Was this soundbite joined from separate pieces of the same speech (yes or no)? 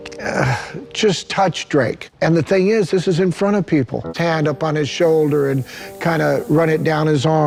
no